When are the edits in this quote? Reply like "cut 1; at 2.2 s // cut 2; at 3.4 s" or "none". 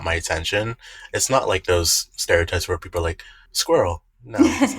cut 1; at 3.5 s

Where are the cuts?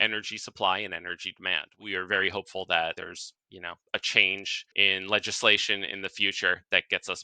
cut 1; at 1.7 s // cut 2; at 3.0 s // cut 3; at 4.6 s

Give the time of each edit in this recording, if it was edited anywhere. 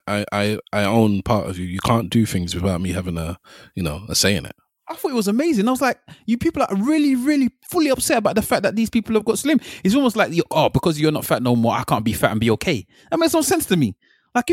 none

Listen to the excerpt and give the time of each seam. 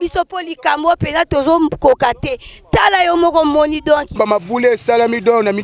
cut 1; at 4.2 s

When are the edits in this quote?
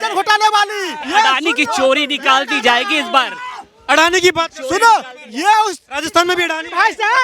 cut 1; at 1.0 s

